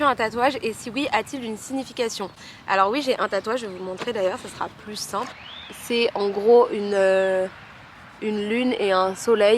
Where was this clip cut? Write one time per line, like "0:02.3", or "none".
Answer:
none